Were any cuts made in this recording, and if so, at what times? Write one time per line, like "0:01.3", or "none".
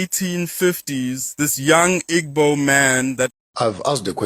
0:03.3